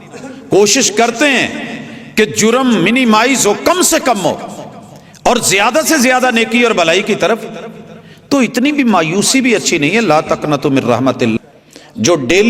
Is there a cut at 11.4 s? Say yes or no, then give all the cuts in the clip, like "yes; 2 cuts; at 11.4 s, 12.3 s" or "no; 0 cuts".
yes; 1 cut; at 11.4 s